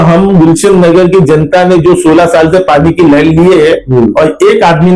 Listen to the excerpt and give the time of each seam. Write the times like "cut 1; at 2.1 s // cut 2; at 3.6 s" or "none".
none